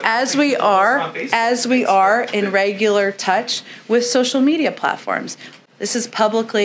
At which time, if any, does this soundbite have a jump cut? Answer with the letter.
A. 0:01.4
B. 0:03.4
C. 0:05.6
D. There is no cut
D